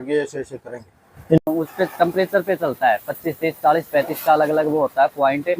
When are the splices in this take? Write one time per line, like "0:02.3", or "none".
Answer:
0:01.4